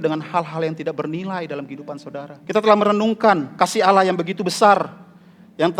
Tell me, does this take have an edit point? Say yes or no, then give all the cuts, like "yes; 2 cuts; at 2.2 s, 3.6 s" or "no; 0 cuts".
yes; 2 cuts; at 2.3 s, 3.5 s